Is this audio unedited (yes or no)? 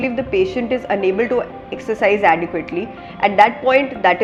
yes